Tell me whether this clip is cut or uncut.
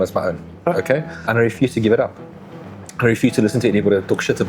cut